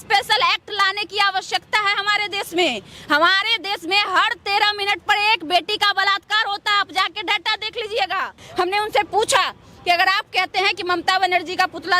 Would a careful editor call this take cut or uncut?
cut